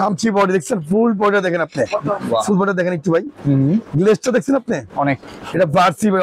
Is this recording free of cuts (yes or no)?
yes